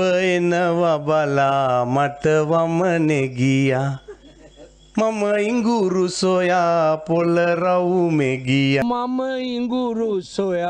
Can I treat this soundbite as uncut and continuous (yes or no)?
no